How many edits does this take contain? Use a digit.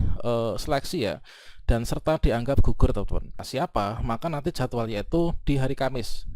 1